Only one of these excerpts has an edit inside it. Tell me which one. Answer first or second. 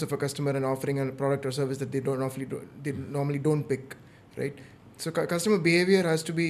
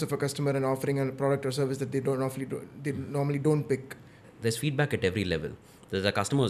second